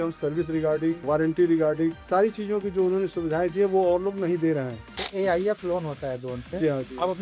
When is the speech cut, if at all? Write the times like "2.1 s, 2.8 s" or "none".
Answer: 1.0 s, 2.0 s, 5.0 s